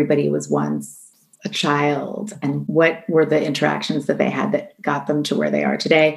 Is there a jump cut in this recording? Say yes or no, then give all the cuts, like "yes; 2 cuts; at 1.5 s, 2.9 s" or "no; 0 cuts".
no; 0 cuts